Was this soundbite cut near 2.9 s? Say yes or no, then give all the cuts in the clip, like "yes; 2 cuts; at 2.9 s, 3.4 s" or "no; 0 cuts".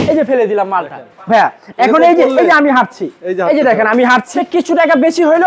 no; 1 cut; at 4.3 s